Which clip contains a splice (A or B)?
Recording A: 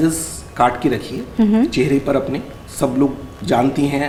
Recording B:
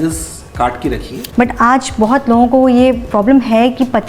B